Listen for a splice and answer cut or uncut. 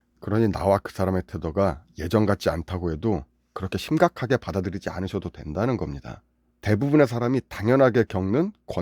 uncut